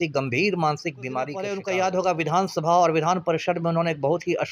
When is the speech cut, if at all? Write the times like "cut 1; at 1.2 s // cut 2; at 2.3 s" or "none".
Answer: cut 1; at 1.5 s